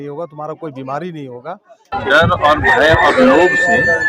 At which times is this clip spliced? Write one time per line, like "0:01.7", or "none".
0:01.9